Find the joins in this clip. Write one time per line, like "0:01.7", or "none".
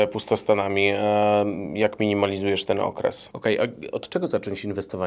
0:03.3